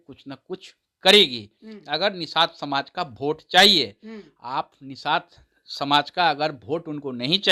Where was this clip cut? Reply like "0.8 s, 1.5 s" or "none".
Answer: none